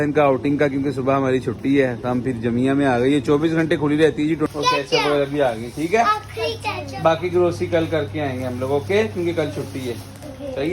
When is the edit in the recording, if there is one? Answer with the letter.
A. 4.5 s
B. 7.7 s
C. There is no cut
A